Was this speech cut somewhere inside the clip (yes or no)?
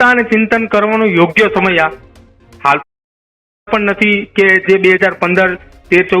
no